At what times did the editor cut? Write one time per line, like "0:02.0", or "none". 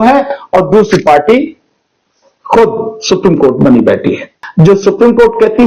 0:04.4